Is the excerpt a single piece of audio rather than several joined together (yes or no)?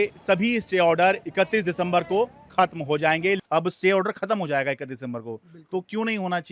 no